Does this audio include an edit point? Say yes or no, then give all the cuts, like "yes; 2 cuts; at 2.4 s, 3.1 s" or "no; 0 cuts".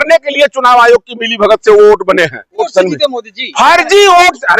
yes; 1 cut; at 2.7 s